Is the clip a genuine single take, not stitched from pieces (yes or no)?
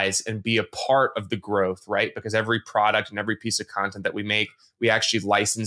yes